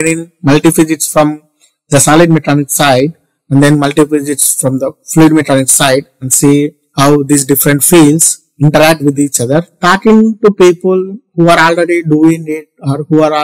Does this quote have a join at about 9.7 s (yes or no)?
yes